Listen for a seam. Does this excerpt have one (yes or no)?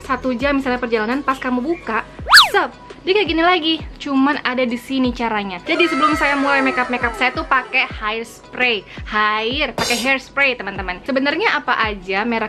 no